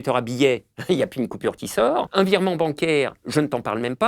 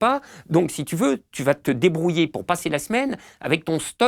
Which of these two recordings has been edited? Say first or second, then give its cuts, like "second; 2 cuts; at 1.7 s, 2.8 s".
first; 1 cut; at 2.1 s